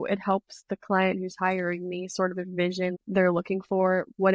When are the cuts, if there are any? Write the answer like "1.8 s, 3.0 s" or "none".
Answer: 3.0 s